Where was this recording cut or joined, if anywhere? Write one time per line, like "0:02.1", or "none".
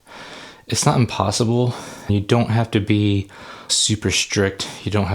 0:02.1
0:03.7